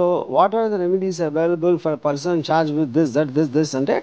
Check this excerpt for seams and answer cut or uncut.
uncut